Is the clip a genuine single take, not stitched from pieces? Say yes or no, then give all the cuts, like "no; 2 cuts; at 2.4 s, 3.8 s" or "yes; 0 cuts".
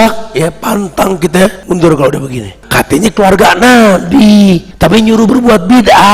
no; 3 cuts; at 1.6 s, 2.6 s, 4.7 s